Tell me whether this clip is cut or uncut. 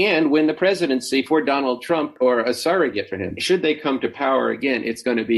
cut